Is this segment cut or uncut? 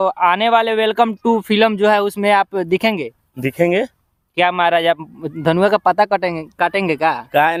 uncut